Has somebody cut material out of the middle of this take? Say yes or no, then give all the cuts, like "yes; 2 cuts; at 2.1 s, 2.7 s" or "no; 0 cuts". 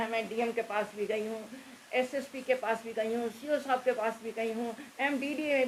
no; 0 cuts